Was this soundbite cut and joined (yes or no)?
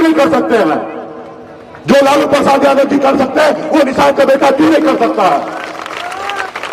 no